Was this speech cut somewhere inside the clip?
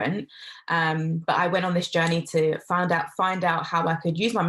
no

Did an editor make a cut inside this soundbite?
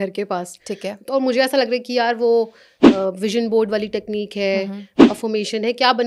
no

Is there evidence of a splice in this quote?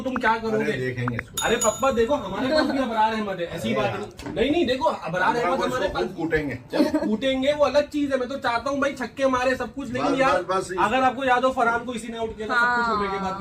no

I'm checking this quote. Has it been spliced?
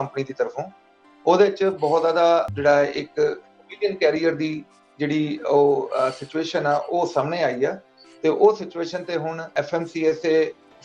yes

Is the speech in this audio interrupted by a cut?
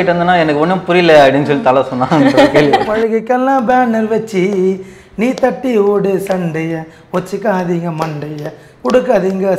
yes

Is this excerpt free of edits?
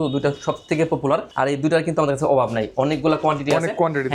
no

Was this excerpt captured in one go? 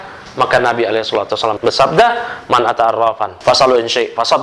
no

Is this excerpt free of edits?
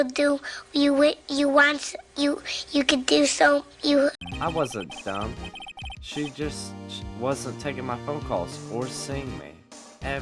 no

